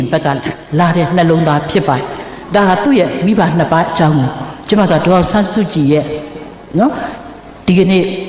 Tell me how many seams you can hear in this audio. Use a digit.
0